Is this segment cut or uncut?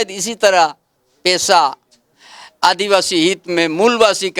uncut